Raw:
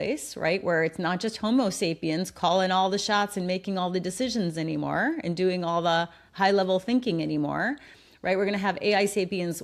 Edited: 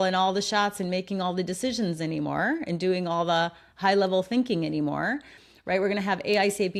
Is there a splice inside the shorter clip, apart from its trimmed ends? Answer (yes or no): no